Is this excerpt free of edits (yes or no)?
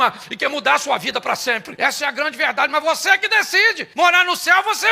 no